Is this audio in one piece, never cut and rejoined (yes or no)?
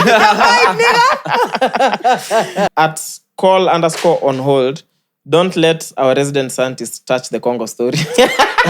no